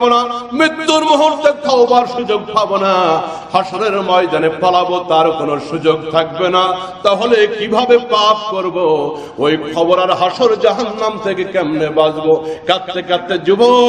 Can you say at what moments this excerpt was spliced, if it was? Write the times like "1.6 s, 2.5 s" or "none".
none